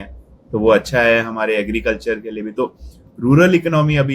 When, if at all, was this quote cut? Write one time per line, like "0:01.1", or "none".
none